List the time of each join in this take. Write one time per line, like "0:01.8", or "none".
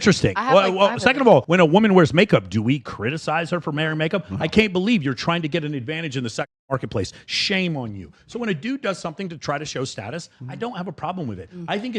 0:01.5